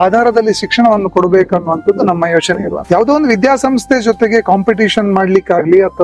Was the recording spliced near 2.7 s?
yes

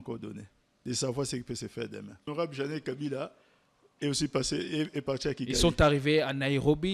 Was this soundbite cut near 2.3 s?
yes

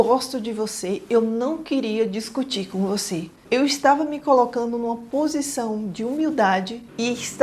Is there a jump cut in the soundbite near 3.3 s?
yes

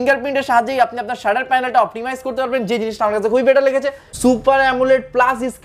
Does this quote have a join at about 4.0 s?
yes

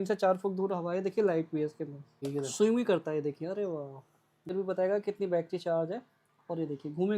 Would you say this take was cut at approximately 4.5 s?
yes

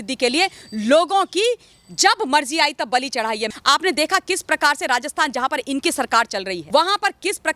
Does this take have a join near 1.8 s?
no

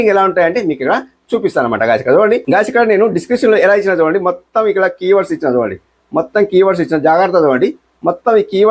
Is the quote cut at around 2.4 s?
yes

